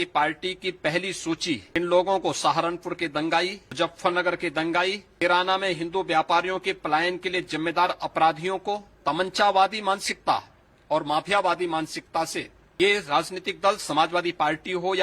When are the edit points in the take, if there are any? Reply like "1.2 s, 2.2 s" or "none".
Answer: 1.8 s, 3.6 s, 5.2 s, 8.9 s, 12.6 s